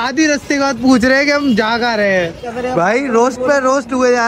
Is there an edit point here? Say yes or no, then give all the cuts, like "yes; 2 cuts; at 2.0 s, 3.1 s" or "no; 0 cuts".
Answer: yes; 1 cut; at 2.6 s